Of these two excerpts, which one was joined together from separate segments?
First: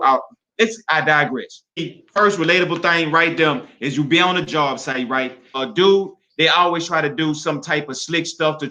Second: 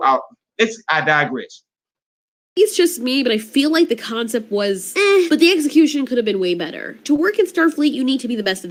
first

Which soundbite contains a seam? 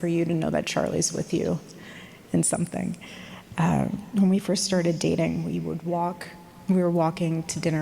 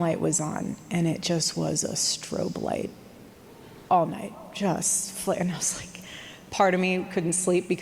first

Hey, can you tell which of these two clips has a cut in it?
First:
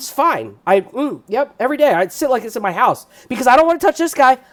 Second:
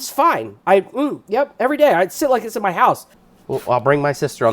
second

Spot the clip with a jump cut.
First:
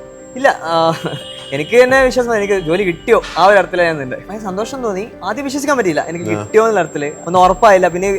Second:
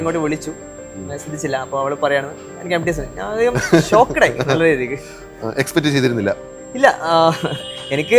first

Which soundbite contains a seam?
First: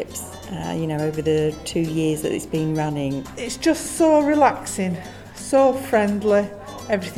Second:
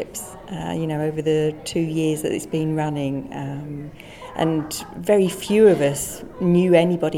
first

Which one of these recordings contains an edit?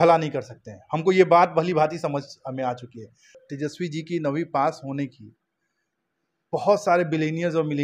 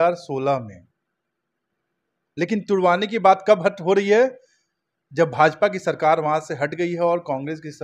first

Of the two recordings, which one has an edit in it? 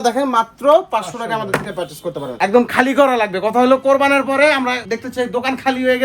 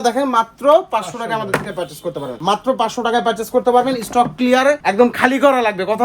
first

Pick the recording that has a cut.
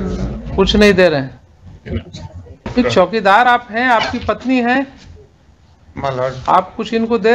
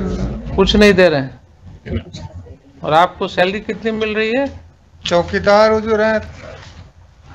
first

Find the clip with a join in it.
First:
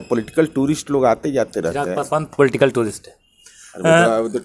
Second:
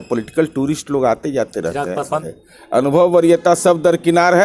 second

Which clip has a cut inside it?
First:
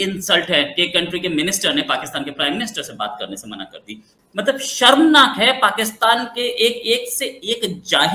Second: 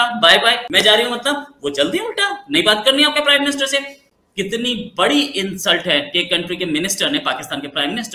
first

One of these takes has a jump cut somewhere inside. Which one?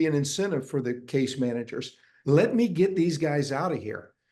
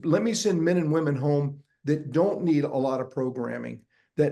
first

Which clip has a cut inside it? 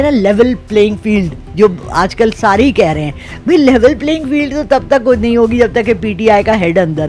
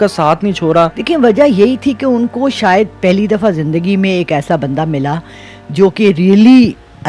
second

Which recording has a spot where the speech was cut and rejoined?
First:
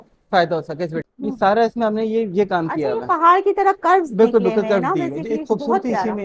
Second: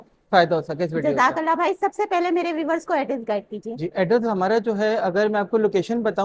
first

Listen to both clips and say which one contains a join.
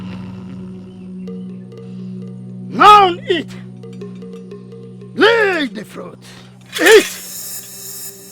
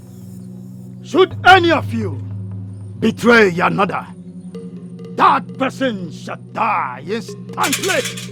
first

